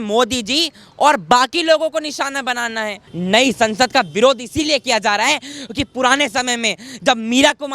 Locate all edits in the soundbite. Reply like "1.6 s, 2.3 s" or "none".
3.0 s